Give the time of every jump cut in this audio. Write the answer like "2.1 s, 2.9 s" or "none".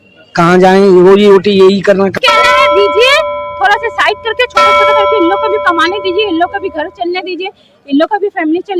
2.1 s